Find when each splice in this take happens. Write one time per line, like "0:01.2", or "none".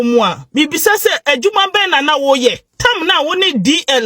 0:02.7

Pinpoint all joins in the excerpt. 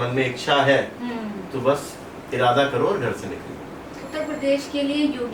0:04.0

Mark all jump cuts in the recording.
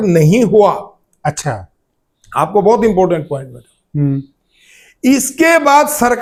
none

